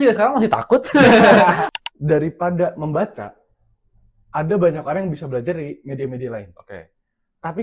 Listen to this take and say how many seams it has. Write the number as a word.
one